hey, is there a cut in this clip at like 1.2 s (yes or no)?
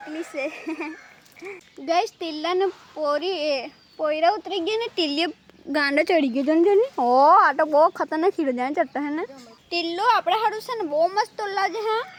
no